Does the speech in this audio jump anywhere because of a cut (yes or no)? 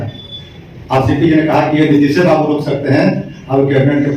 no